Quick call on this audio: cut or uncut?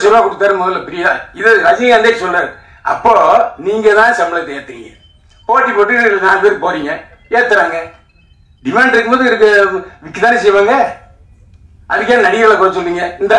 uncut